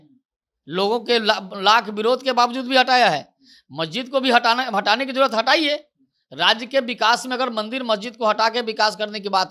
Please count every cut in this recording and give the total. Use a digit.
0